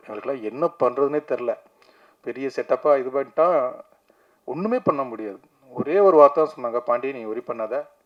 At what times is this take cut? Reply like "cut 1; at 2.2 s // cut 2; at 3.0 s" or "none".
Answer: none